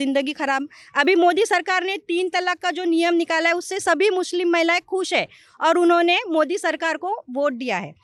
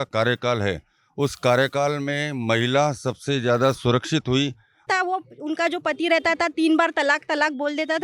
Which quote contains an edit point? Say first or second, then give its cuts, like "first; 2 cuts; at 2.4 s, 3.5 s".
second; 1 cut; at 4.9 s